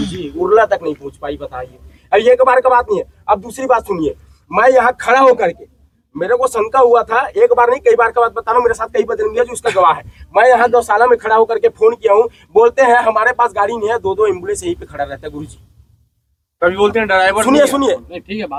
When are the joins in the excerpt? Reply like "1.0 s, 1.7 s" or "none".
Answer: none